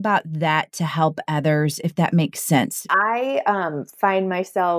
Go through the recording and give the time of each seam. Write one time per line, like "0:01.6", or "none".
0:02.8